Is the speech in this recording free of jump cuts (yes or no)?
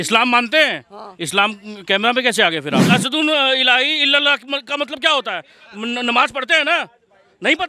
no